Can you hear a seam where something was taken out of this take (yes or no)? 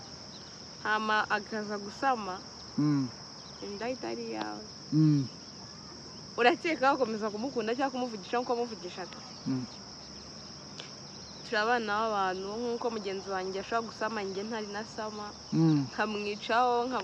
no